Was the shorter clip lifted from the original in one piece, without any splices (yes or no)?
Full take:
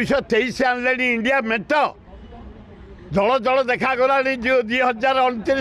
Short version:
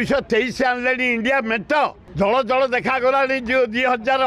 no